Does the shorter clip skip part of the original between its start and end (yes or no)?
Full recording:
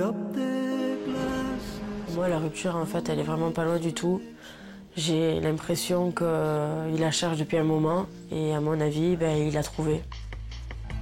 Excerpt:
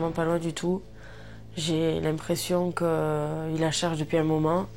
no